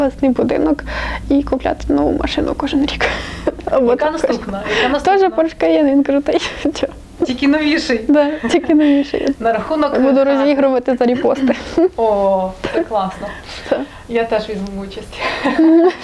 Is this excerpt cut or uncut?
uncut